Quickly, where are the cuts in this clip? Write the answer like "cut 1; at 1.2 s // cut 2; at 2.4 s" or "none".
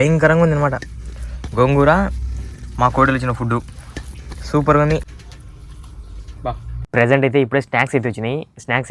cut 1; at 5.1 s // cut 2; at 6.7 s